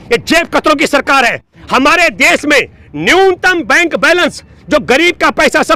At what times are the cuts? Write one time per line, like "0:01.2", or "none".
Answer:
none